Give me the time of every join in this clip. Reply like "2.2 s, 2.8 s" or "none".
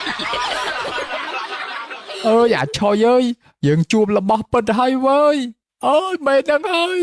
2.1 s